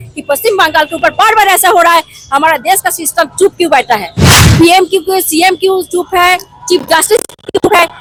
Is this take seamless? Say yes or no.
yes